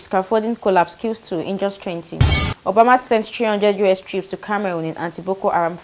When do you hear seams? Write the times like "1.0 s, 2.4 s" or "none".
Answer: none

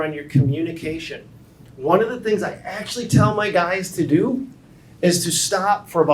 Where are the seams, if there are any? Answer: none

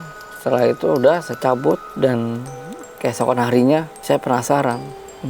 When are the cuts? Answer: 1.9 s, 3.9 s

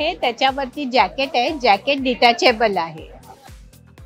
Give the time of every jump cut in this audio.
none

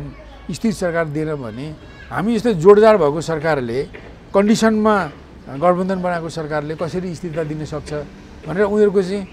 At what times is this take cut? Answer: none

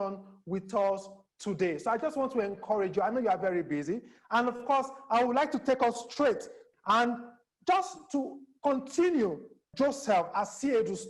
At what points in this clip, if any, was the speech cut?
6.6 s, 9.6 s

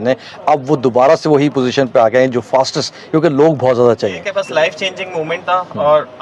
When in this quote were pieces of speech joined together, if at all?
4.3 s

